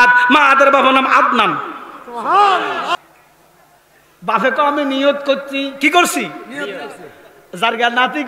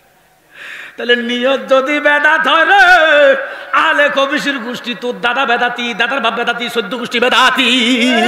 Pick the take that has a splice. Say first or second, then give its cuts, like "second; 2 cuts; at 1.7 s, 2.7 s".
first; 1 cut; at 2.9 s